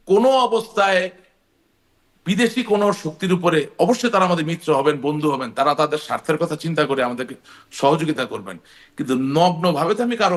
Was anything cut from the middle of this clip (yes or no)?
no